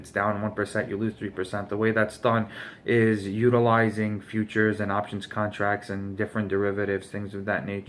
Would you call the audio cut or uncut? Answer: cut